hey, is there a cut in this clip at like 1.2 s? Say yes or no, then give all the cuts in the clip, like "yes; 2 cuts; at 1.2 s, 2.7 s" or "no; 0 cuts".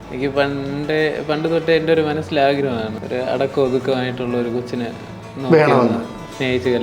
no; 1 cut; at 2.9 s